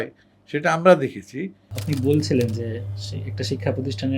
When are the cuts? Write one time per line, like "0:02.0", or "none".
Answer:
0:01.7